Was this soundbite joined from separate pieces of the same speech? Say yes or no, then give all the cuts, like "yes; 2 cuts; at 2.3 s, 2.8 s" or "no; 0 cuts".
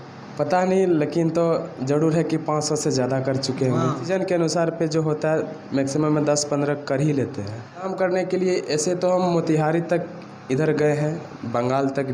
yes; 2 cuts; at 4.1 s, 7.9 s